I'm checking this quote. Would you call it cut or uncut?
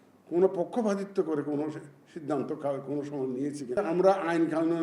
uncut